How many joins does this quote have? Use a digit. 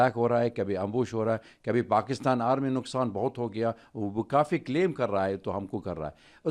0